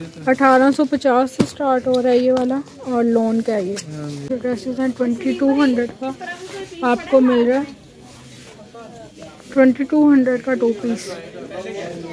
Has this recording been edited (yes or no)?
yes